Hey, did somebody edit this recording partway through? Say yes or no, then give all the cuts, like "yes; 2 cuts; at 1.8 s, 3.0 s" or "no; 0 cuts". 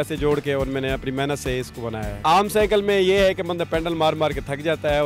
yes; 1 cut; at 2.1 s